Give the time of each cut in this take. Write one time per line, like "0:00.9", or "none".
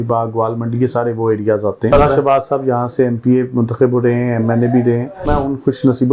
0:01.9
0:05.2